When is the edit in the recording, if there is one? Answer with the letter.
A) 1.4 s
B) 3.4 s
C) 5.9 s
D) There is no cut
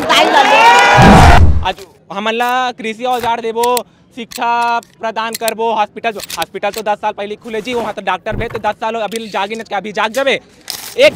A